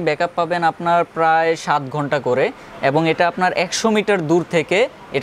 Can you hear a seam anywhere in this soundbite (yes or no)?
no